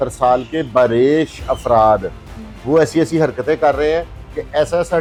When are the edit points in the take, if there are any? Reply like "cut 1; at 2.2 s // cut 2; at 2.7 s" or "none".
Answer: none